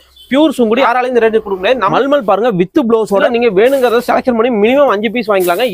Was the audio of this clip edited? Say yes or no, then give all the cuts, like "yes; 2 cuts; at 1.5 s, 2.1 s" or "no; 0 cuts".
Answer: yes; 3 cuts; at 0.9 s, 1.9 s, 3.2 s